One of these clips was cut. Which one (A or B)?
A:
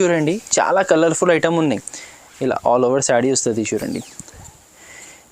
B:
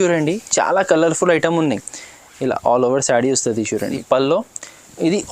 B